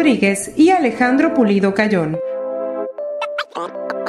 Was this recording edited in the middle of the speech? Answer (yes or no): no